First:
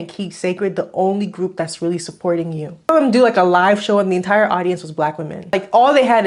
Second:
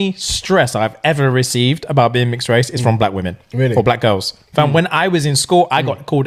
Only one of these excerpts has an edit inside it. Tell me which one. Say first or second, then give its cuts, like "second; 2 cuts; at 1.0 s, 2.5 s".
first; 2 cuts; at 2.9 s, 5.5 s